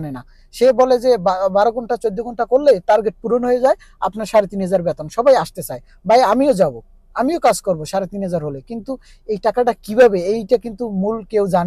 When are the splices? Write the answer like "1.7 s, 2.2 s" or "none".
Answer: none